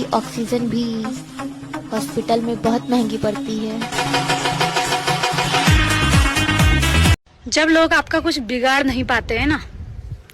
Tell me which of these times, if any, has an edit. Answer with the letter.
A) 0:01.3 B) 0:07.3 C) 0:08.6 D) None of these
B